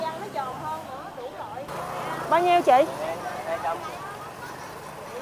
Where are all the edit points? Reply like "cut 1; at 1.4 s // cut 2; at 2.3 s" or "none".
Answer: cut 1; at 1.7 s